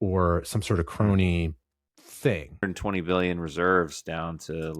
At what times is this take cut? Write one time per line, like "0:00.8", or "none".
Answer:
0:02.6